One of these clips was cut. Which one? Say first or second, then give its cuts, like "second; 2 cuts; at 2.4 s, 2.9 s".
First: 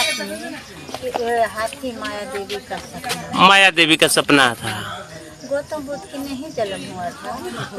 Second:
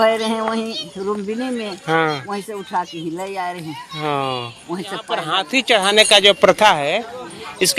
second; 1 cut; at 5.4 s